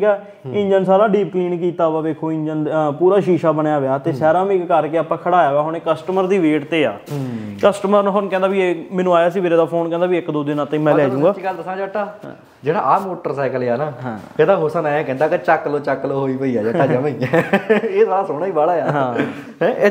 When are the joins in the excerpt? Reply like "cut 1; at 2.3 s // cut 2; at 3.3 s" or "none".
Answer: none

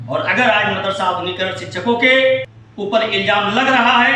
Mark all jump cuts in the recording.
cut 1; at 2.6 s

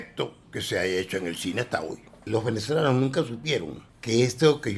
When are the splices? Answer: cut 1; at 2.1 s

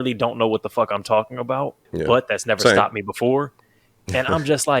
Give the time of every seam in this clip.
none

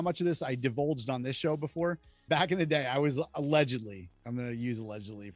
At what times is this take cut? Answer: cut 1; at 2.2 s

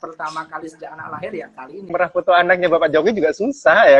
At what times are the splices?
cut 1; at 1.9 s

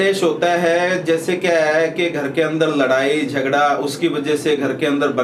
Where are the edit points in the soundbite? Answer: none

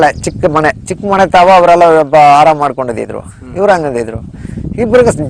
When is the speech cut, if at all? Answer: none

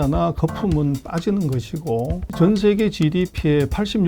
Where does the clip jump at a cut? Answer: cut 1; at 2.2 s

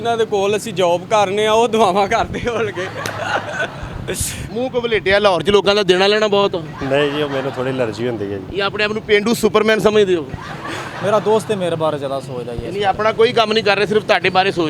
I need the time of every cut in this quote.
cut 1; at 4.4 s // cut 2; at 11.0 s

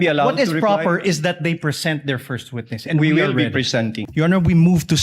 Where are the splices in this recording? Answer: cut 1; at 4.0 s

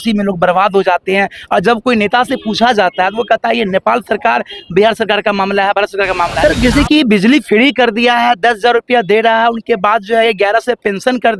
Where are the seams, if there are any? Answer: cut 1; at 6.4 s

